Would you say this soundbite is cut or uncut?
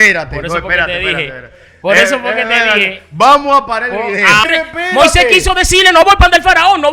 cut